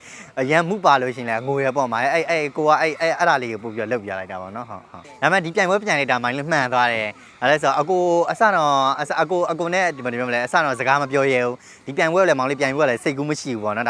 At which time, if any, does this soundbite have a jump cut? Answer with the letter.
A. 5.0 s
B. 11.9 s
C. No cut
A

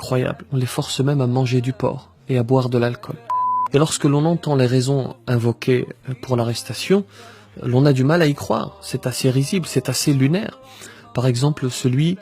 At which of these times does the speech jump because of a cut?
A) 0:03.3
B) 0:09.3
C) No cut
A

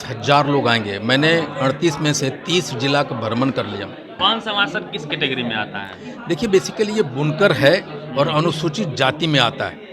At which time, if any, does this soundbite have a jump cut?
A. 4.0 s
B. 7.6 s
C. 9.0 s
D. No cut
A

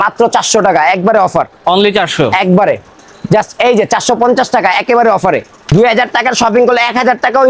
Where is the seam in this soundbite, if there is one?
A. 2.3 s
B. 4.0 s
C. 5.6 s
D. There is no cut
C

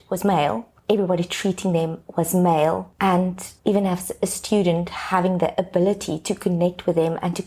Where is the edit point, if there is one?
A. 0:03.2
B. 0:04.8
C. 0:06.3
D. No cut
A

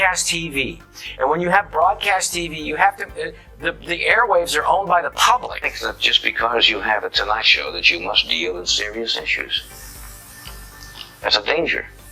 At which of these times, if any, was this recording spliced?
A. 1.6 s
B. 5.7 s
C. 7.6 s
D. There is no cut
B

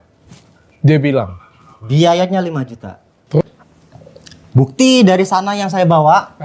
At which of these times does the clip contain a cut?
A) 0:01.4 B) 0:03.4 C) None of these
B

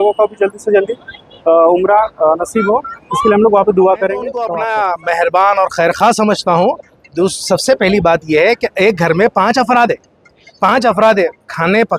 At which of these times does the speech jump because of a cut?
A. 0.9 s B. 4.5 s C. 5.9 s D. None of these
B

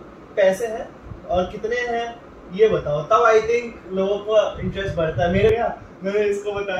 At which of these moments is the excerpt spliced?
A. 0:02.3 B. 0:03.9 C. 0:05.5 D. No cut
C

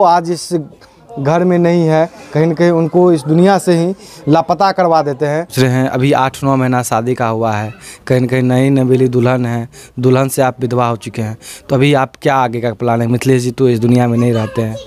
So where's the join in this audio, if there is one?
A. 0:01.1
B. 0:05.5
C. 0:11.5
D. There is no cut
B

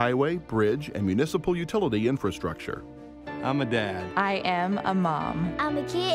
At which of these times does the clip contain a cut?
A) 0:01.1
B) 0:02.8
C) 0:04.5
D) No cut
D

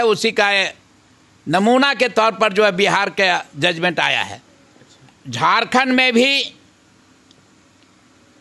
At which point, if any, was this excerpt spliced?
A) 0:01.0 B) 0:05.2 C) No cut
B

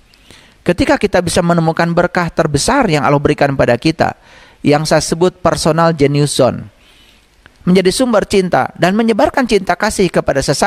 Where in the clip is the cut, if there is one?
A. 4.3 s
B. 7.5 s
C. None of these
B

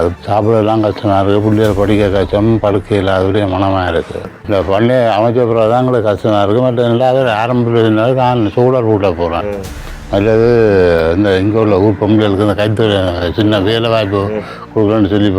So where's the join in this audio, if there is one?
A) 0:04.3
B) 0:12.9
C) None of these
A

